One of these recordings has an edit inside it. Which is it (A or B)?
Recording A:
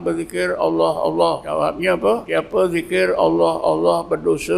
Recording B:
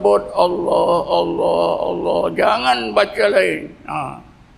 A